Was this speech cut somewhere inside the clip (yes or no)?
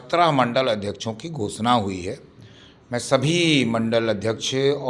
no